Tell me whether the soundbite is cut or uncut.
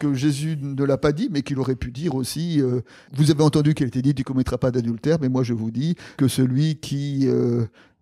cut